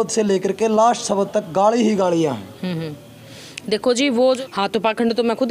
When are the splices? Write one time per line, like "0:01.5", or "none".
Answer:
0:04.4